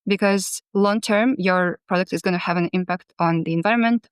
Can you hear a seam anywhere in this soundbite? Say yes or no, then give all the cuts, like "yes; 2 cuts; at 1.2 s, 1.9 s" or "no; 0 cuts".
no; 0 cuts